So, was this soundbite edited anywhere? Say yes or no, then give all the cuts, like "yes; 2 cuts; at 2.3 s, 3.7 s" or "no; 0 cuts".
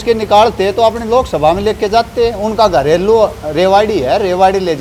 no; 0 cuts